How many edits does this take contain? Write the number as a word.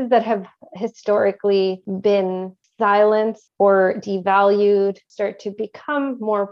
three